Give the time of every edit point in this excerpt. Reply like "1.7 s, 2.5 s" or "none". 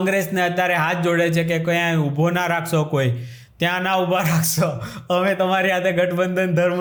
none